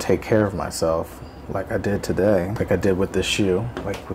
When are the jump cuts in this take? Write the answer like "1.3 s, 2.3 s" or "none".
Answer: 2.5 s